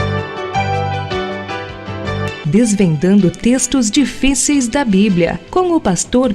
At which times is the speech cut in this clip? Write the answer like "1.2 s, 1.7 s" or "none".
none